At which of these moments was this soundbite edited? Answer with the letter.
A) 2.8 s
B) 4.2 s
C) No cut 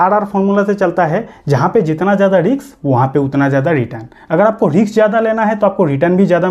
C